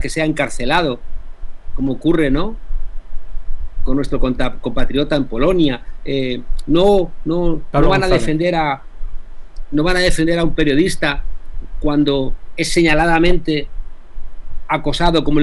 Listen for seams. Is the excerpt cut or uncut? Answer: uncut